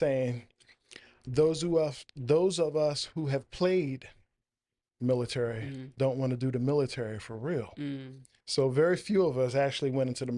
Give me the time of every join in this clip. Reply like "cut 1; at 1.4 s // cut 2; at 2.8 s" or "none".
none